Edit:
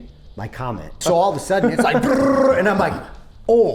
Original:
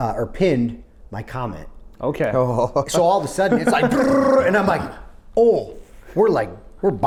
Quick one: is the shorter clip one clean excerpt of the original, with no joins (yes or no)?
no